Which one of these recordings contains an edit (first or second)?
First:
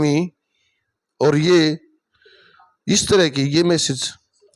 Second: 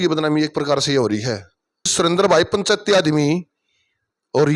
second